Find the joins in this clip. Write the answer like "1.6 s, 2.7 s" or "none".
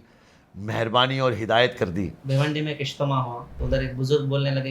2.2 s, 3.5 s